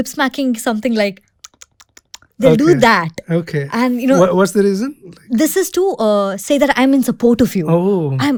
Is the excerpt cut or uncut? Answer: uncut